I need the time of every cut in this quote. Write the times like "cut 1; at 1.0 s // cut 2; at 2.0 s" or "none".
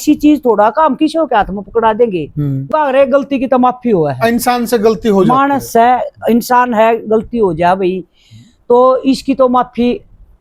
cut 1; at 2.2 s